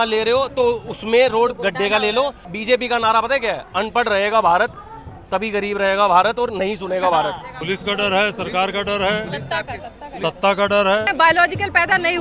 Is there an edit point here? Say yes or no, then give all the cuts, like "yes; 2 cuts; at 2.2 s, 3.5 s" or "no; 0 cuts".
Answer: yes; 3 cuts; at 2.5 s, 7.5 s, 11.1 s